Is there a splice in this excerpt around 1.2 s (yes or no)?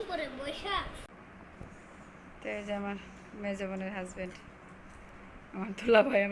yes